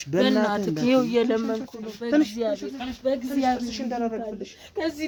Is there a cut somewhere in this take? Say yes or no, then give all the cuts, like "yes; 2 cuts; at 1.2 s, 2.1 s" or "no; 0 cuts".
no; 0 cuts